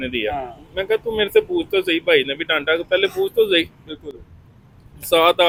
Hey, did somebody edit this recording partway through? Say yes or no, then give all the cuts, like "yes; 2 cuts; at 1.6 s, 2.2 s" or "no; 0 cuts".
no; 0 cuts